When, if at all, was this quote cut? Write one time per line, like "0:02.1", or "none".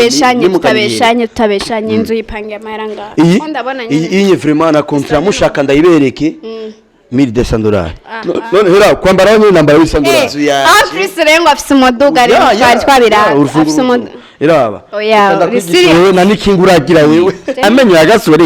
0:10.3
0:17.5